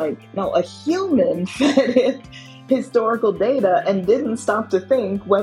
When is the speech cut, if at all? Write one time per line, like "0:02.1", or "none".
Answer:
none

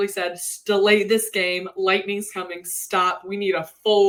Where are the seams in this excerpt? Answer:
none

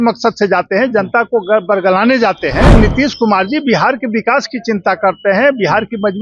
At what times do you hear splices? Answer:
0:02.7

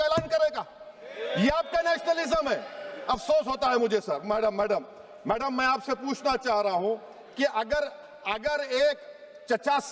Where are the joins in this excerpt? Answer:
none

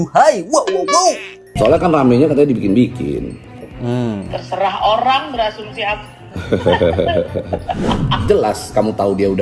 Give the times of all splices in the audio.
none

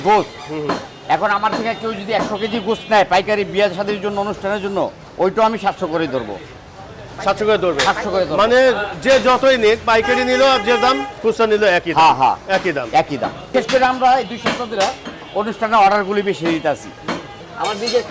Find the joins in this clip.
none

